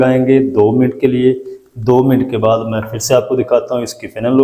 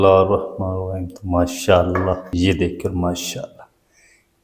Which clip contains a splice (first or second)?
second